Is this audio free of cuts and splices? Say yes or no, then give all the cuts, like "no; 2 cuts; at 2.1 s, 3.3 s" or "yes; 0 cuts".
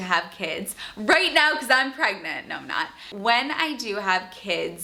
yes; 0 cuts